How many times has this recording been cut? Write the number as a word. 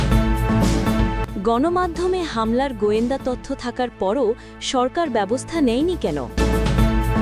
two